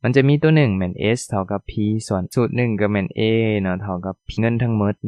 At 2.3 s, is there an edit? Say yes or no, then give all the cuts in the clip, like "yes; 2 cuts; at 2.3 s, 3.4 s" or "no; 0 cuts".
yes; 2 cuts; at 2.3 s, 4.4 s